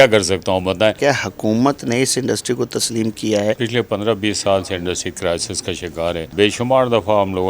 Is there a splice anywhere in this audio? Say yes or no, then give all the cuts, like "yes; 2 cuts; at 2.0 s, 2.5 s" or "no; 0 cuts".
yes; 3 cuts; at 1.0 s, 3.6 s, 6.3 s